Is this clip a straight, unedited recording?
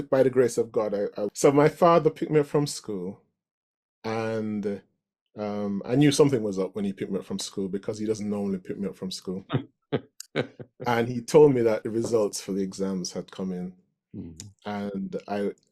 no; 1 cut; at 1.2 s

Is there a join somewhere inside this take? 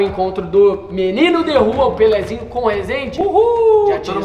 no; 0 cuts

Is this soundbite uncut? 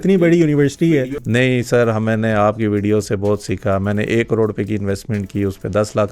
no; 1 cut; at 1.1 s

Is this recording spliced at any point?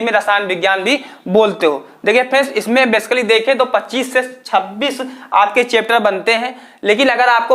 no; 0 cuts

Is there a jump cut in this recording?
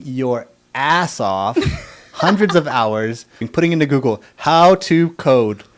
yes; 1 cut; at 3.5 s

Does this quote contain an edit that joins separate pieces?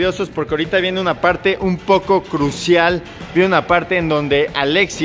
yes; 1 cut; at 3.2 s

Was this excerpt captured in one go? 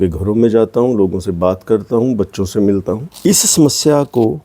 no; 1 cut; at 3.5 s

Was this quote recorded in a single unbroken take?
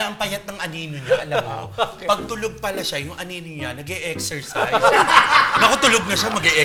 yes; 0 cuts

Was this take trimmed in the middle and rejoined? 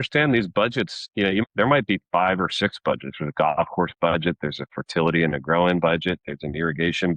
yes; 1 cut; at 1.3 s

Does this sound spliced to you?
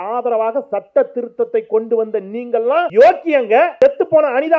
yes; 2 cuts; at 2.9 s, 3.7 s

